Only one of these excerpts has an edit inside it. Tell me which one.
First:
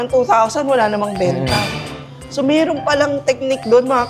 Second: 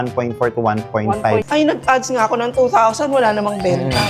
second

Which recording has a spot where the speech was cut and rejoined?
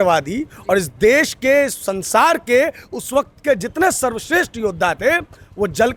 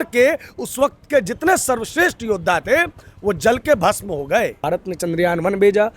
second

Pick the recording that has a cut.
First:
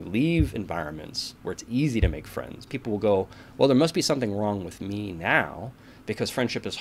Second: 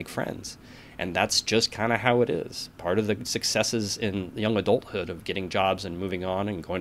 first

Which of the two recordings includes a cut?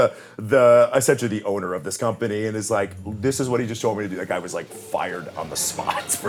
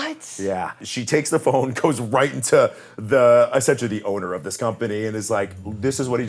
second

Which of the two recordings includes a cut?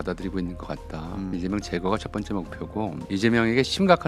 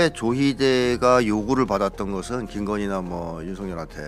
first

